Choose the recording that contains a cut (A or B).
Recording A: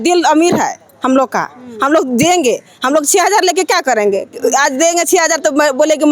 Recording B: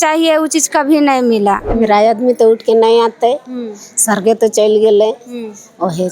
B